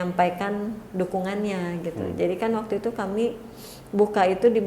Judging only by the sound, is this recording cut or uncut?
uncut